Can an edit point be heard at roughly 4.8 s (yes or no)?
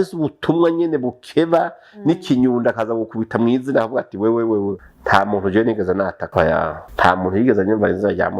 yes